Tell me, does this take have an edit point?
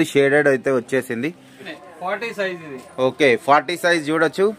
yes; 1 cut; at 1.8 s

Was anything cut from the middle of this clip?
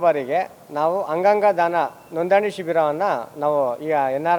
no; 0 cuts

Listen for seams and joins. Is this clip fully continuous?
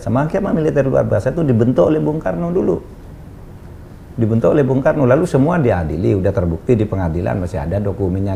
yes; 0 cuts

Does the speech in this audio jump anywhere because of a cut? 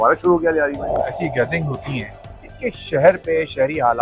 yes; 1 cut; at 1.1 s

